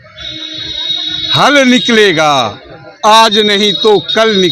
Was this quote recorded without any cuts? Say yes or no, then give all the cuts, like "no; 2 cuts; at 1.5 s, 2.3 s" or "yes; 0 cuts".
yes; 0 cuts